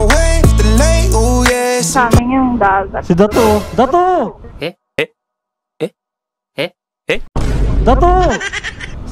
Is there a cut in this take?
yes; 1 cut; at 2.1 s

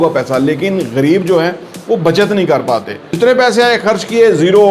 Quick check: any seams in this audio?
yes; 1 cut; at 3.1 s

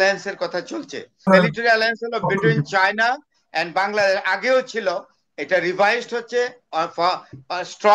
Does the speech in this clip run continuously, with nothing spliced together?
no; 1 cut; at 1.3 s

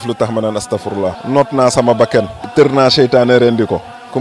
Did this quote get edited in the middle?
yes; 2 cuts; at 1.2 s, 2.4 s

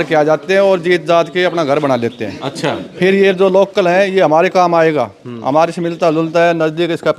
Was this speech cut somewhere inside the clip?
no; 0 cuts

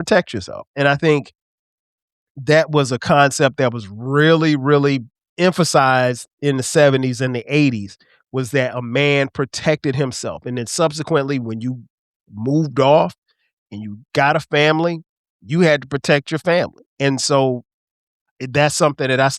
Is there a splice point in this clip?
yes; 2 cuts; at 5.2 s, 16.8 s

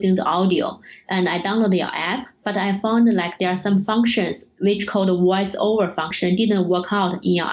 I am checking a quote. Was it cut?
yes; 2 cuts; at 4.4 s, 6.1 s

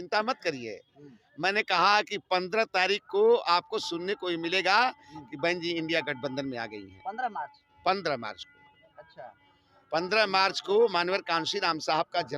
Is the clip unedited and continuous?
yes; 0 cuts

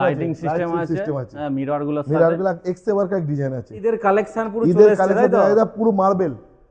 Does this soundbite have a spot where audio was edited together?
yes; 1 cut; at 3.9 s

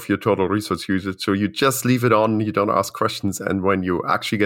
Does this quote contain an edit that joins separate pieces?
no; 0 cuts

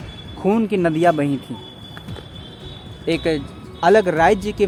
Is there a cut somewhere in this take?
no; 0 cuts

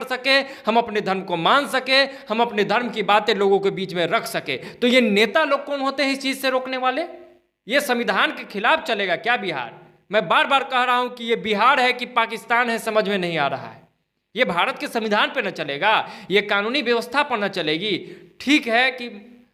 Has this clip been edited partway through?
no; 0 cuts

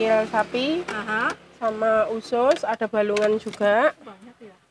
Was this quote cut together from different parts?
no; 0 cuts

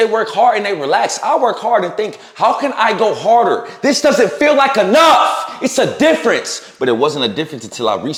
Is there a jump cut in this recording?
no; 0 cuts

